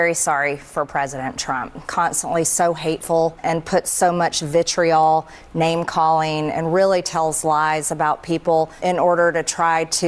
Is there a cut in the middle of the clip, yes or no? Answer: yes